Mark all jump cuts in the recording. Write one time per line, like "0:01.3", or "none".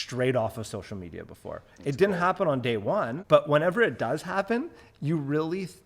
0:03.2